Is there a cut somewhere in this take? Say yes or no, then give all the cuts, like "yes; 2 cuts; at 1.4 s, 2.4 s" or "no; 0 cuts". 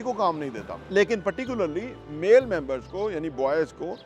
yes; 1 cut; at 0.9 s